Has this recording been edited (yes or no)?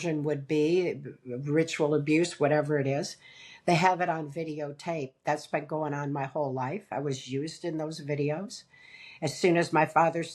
no